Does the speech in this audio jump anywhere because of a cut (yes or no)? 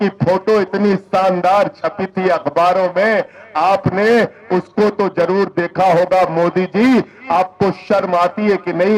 no